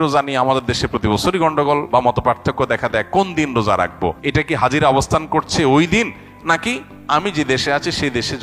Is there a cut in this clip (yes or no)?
yes